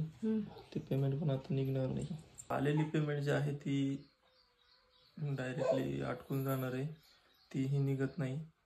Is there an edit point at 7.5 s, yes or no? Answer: no